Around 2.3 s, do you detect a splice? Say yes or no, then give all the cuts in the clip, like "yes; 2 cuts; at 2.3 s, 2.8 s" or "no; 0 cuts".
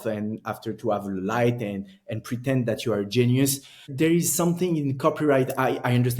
no; 1 cut; at 3.8 s